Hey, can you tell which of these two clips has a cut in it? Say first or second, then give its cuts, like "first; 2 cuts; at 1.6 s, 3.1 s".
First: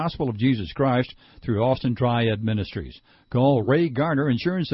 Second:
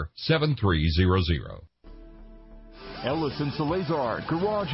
second; 1 cut; at 1.8 s